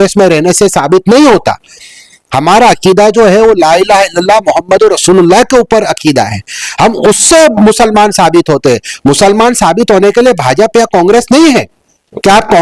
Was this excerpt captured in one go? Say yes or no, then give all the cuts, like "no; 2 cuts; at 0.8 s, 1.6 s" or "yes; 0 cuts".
yes; 0 cuts